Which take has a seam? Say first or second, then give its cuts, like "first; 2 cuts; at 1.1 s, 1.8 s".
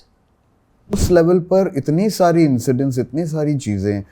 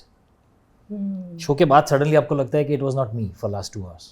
first; 1 cut; at 0.9 s